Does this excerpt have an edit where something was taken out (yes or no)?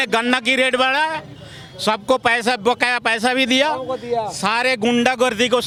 no